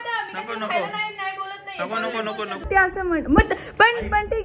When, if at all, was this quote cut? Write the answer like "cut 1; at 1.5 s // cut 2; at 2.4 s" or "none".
cut 1; at 2.7 s